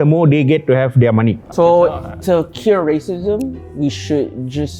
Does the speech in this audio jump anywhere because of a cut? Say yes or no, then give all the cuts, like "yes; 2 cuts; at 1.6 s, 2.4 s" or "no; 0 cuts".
yes; 1 cut; at 1.4 s